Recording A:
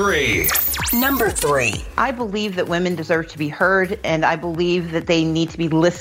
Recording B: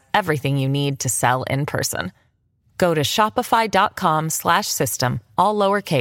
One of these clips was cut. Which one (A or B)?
A